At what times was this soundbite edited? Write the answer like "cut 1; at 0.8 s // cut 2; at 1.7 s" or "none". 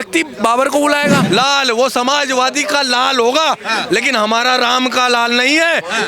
cut 1; at 1.2 s